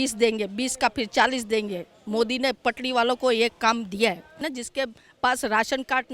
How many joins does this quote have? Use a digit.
1